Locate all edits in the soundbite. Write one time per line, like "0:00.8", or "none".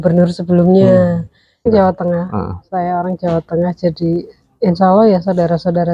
0:01.7